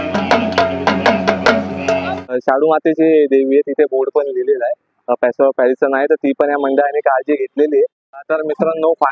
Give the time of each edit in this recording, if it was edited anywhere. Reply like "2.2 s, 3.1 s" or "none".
2.3 s, 8.1 s